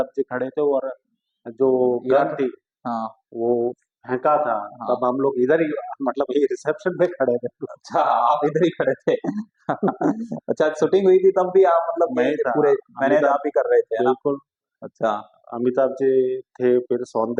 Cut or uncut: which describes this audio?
uncut